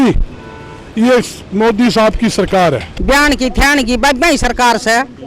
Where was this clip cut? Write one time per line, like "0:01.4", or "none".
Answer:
0:02.9